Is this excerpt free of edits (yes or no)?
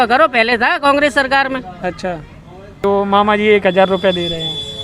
no